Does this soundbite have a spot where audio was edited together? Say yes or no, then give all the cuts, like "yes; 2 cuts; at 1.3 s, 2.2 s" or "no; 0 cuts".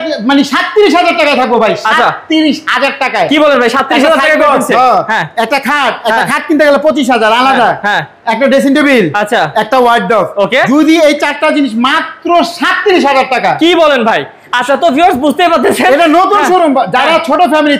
no; 0 cuts